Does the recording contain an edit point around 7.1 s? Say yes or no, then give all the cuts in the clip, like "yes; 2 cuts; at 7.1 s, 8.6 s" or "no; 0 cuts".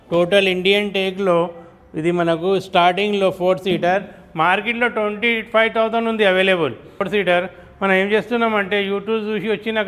yes; 1 cut; at 7.1 s